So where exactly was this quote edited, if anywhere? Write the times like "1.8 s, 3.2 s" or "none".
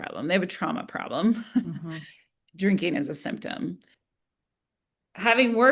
3.9 s

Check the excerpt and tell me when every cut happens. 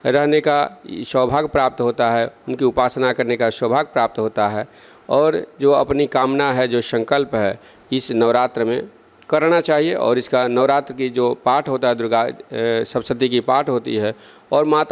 none

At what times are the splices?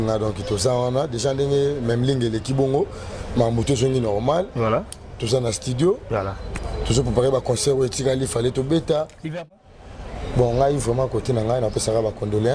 9.5 s

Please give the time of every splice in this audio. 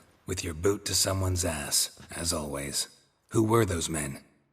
2.9 s

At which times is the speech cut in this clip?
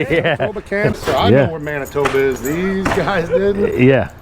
0.9 s

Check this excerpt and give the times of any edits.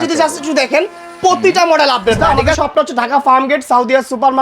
2.2 s

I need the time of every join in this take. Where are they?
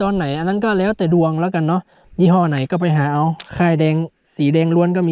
2.0 s

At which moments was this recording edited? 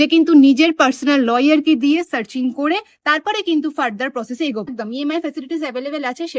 4.8 s

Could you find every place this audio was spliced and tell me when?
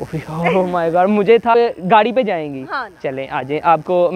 1.5 s

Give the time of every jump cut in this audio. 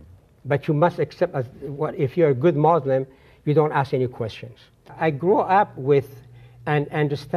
4.9 s

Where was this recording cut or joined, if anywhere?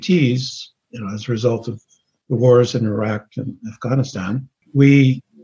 4.5 s

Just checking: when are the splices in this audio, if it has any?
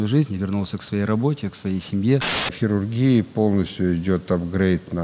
2.6 s

